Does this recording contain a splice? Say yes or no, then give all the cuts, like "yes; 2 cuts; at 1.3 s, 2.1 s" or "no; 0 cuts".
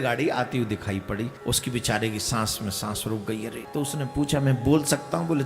yes; 2 cuts; at 1.4 s, 3.6 s